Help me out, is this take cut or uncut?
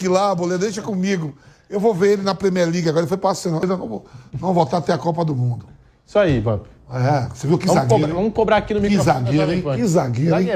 cut